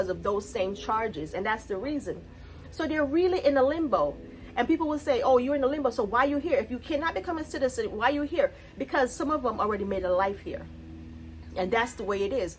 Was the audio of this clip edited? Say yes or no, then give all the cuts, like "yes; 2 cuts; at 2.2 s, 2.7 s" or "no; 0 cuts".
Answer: no; 0 cuts